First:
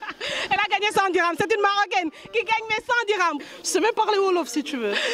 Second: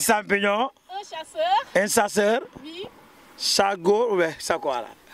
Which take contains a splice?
first; 1 cut; at 3.4 s

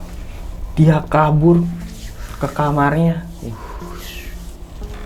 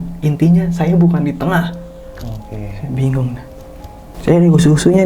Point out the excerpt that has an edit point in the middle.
second; 1 cut; at 4.0 s

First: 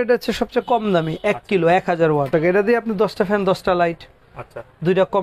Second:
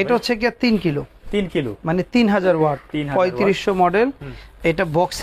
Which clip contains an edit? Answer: first; 1 cut; at 2.3 s

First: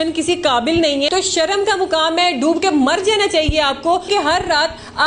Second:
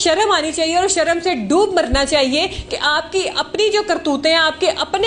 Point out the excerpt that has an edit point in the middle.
first; 2 cuts; at 1.1 s, 4.1 s

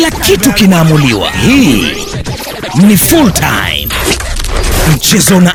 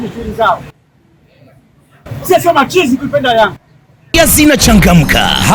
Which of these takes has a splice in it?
second; 1 cut; at 4.1 s

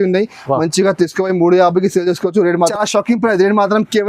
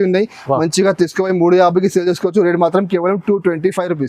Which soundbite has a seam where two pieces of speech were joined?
first; 1 cut; at 2.7 s

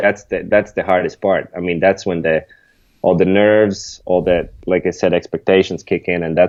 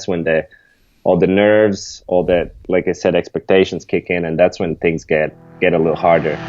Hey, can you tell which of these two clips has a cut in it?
second; 1 cut; at 5.4 s

